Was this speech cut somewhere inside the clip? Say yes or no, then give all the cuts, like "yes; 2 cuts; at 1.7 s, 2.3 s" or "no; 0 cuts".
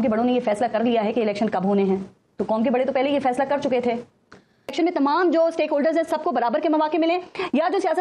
yes; 1 cut; at 4.7 s